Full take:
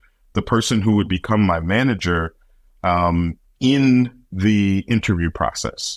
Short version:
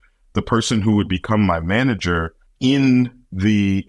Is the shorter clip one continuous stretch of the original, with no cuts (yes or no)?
no